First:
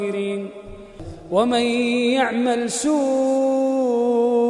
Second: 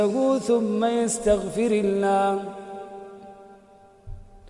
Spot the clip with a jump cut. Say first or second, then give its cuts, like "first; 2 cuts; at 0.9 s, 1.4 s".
first; 1 cut; at 1.0 s